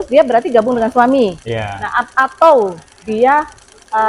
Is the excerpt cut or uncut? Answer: uncut